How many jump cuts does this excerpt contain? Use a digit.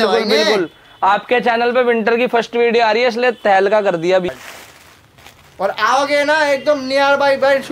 1